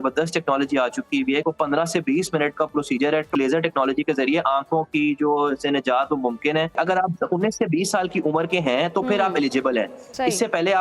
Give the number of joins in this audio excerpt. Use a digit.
3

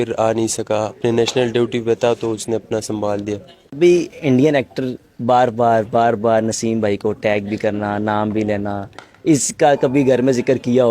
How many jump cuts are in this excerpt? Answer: 1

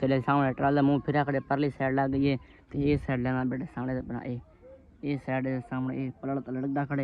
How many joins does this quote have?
0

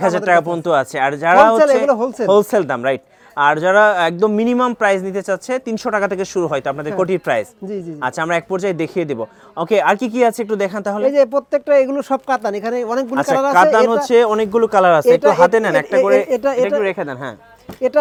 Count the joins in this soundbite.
0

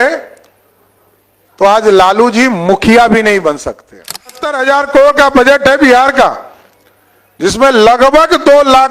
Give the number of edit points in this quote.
1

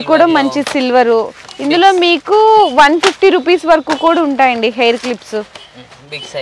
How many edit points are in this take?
0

